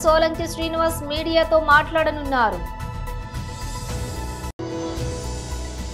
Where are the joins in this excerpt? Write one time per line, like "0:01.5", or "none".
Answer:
0:02.6
0:04.5